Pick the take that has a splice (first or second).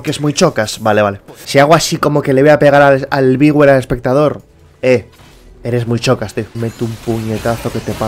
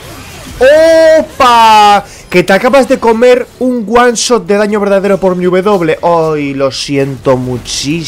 first